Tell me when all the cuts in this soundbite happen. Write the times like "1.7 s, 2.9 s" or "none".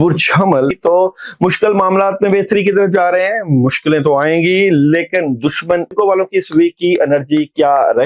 0.8 s, 5.9 s